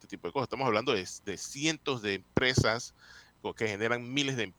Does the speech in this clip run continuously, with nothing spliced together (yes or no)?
yes